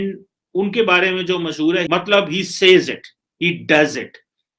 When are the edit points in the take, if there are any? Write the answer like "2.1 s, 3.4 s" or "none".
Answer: 1.8 s